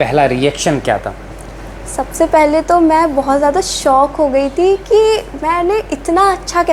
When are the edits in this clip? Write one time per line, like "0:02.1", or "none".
none